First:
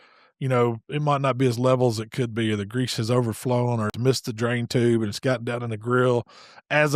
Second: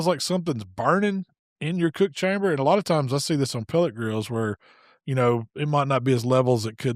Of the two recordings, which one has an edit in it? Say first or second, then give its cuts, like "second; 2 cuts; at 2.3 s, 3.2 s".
first; 1 cut; at 3.9 s